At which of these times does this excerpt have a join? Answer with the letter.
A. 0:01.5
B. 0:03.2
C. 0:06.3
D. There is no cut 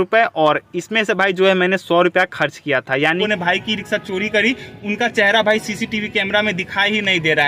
B